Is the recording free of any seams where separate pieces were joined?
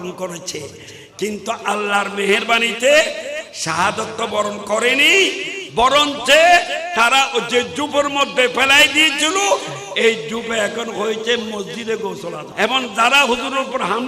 no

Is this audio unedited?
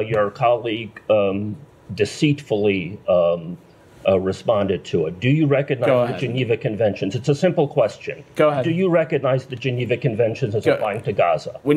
yes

